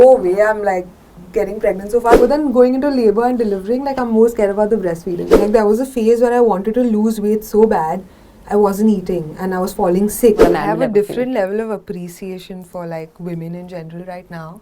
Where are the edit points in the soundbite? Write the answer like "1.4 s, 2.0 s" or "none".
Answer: 2.2 s, 5.2 s, 10.4 s